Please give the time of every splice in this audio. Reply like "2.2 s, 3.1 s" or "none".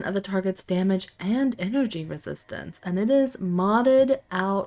none